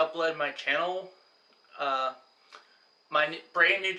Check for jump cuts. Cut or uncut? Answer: uncut